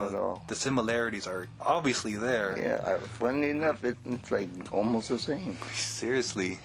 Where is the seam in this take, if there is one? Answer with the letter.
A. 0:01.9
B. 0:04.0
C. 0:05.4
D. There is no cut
B